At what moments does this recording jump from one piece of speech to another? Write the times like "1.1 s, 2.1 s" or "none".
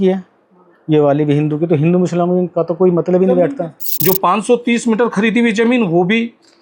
3.8 s